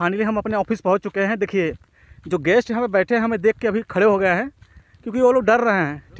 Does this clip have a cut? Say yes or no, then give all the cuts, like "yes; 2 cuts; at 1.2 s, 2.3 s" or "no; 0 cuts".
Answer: no; 0 cuts